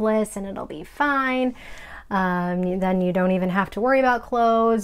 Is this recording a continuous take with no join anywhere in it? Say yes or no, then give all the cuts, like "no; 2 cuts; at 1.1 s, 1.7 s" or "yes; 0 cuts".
yes; 0 cuts